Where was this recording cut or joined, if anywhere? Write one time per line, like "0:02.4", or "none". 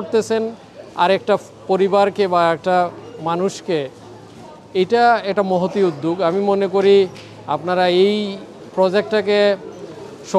none